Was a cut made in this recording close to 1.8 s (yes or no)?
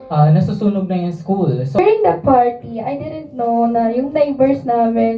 yes